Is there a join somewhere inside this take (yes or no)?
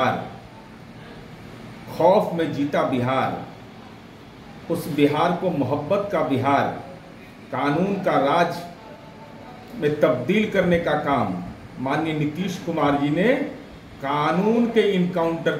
no